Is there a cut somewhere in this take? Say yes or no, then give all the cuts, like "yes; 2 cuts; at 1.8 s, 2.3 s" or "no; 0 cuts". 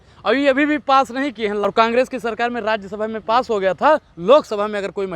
yes; 1 cut; at 1.6 s